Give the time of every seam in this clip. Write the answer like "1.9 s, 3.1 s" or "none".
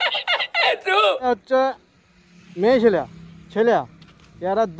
1.2 s